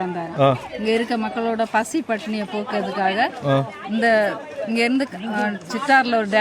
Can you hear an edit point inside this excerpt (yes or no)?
no